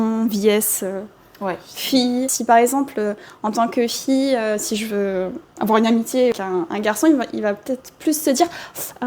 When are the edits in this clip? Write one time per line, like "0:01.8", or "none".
0:02.3
0:06.3